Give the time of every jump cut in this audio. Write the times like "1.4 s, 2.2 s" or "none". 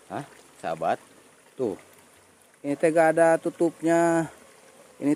none